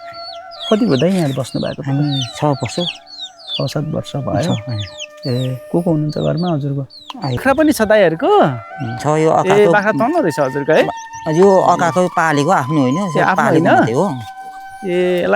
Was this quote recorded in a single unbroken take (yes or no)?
no